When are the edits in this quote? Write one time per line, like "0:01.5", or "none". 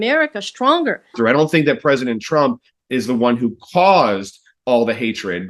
0:01.1